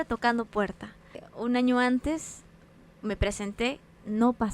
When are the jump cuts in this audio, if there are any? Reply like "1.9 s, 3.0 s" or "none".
1.2 s